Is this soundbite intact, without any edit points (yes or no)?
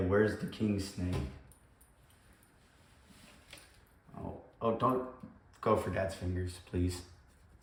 yes